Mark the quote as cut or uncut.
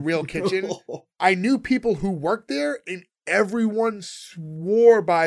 cut